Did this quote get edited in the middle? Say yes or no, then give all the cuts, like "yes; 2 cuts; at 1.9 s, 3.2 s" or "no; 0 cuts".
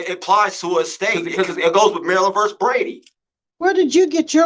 yes; 1 cut; at 1.2 s